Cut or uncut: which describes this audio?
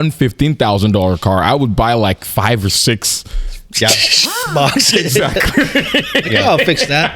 uncut